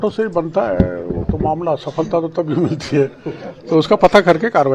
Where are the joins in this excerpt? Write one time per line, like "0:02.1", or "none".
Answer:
none